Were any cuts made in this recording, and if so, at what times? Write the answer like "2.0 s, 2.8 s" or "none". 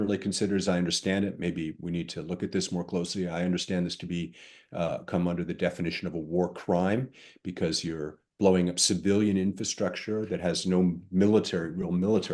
none